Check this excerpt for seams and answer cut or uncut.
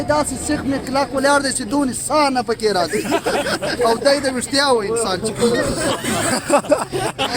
uncut